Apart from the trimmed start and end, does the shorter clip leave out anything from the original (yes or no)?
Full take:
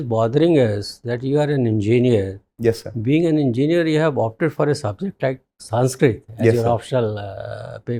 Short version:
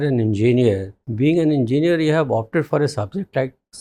yes